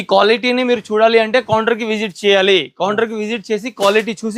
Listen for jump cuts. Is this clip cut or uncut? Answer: uncut